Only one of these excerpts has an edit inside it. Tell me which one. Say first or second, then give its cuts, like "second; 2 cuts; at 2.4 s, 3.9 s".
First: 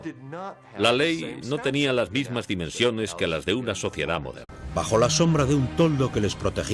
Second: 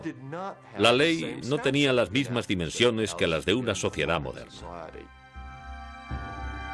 second; 1 cut; at 4.5 s